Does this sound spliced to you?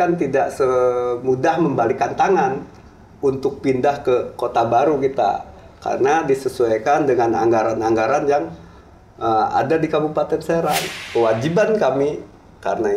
yes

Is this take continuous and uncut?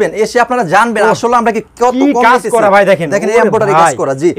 yes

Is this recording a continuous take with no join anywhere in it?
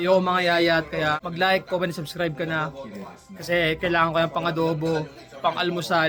yes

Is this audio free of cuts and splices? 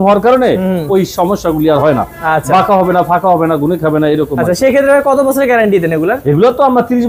yes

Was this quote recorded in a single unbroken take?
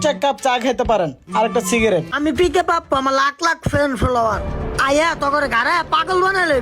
no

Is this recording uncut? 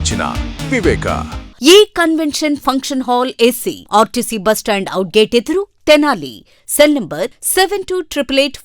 no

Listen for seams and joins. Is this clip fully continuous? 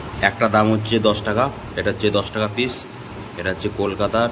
yes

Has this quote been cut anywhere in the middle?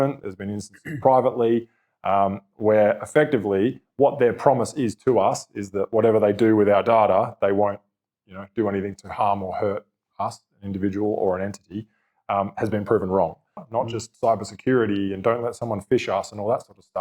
yes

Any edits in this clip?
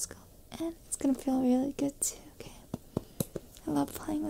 no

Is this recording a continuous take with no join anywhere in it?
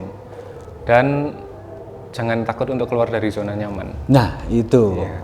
yes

